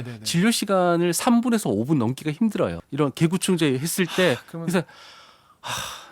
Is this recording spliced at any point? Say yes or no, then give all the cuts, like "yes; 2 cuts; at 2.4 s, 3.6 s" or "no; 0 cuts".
yes; 1 cut; at 2.8 s